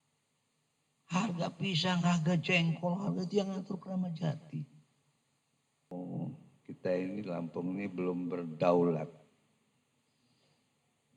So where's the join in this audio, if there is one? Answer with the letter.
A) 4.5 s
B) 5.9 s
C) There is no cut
B